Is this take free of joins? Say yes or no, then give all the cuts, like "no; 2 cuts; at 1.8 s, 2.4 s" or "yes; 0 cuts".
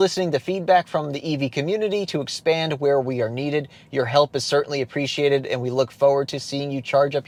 yes; 0 cuts